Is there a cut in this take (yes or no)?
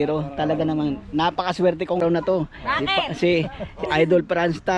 yes